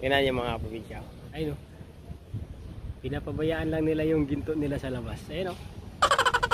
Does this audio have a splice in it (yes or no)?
yes